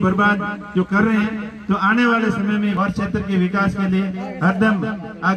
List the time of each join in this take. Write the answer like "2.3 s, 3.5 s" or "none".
2.8 s